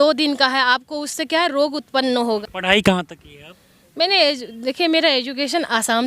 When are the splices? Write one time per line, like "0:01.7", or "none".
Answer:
0:02.3